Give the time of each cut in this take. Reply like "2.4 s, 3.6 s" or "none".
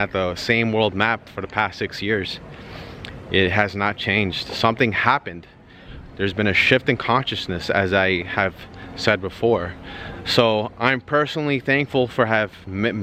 none